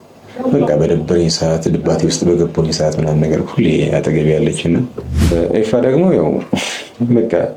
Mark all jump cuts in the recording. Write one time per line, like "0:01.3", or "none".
0:05.3